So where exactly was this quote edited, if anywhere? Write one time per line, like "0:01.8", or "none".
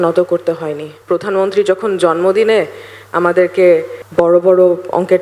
0:00.9
0:04.0